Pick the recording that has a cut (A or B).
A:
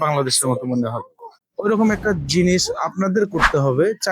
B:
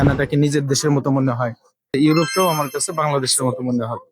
B